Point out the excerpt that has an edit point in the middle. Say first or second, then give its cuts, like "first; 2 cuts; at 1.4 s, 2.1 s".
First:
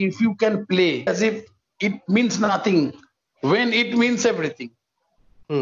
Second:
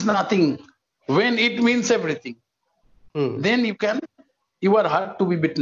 first; 1 cut; at 1.1 s